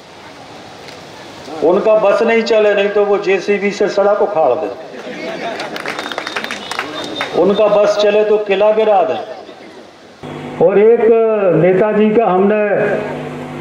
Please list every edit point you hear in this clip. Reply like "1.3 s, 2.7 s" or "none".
10.2 s